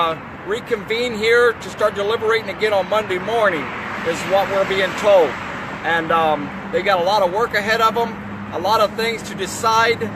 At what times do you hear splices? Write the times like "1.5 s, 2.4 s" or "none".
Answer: 2.1 s